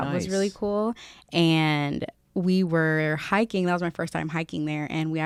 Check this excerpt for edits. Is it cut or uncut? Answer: uncut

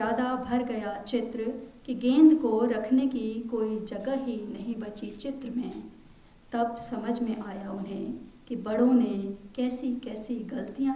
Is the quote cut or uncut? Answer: uncut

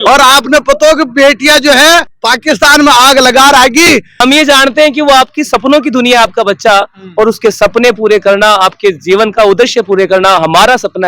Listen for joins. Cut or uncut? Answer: cut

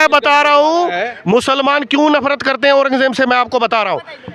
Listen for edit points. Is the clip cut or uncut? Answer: uncut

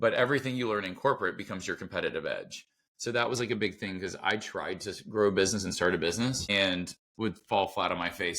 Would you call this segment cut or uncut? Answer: cut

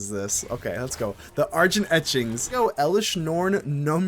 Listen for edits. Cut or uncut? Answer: cut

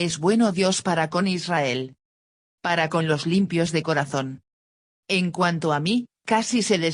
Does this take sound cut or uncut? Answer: cut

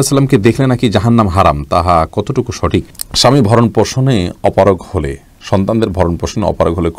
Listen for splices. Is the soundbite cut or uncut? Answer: cut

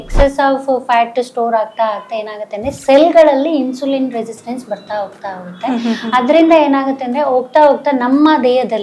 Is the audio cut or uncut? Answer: uncut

